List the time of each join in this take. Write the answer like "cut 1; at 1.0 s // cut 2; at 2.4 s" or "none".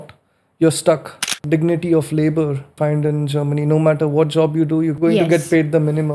cut 1; at 1.4 s // cut 2; at 2.7 s // cut 3; at 4.9 s